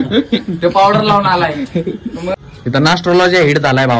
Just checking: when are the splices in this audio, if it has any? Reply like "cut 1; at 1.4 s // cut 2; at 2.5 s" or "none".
cut 1; at 2.3 s